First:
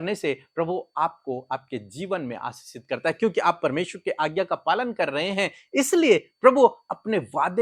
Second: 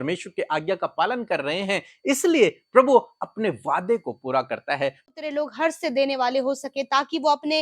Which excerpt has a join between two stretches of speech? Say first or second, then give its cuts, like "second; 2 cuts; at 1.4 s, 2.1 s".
second; 1 cut; at 5.1 s